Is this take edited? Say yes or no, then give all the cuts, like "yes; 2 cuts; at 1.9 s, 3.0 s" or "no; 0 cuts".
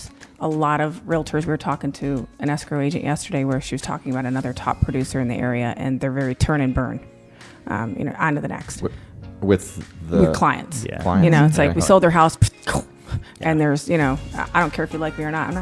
no; 0 cuts